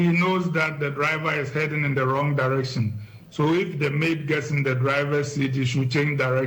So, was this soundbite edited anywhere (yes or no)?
no